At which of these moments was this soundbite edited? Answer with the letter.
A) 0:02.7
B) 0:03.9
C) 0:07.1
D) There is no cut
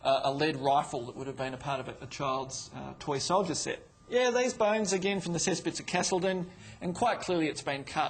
B